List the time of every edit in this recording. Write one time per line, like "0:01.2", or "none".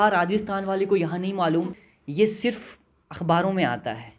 0:01.9

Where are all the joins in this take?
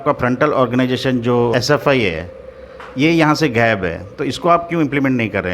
0:01.5

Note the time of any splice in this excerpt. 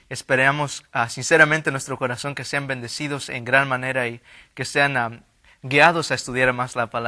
none

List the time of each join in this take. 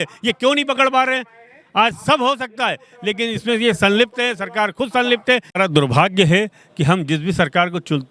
0:05.5

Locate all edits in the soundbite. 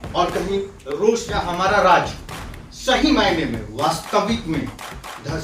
0:01.3

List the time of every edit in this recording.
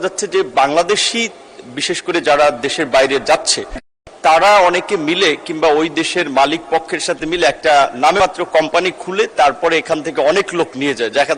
none

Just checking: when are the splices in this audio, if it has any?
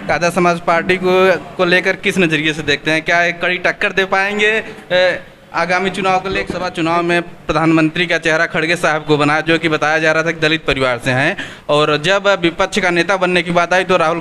0:06.6

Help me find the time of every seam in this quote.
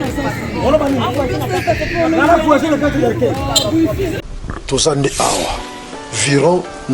0:04.2

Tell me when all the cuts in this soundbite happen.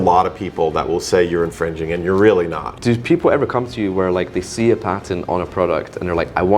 0:02.7

